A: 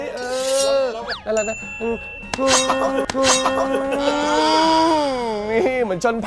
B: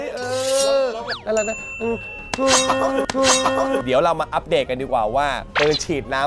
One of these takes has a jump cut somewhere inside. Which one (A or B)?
B